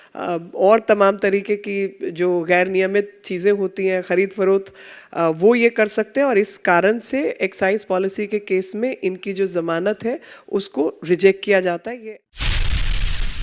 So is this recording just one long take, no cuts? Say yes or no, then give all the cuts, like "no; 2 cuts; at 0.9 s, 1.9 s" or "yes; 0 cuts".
no; 1 cut; at 12.2 s